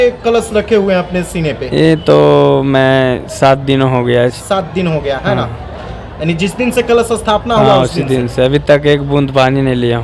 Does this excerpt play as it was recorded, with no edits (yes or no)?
yes